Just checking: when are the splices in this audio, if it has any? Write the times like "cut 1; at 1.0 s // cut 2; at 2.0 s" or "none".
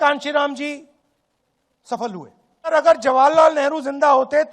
cut 1; at 2.7 s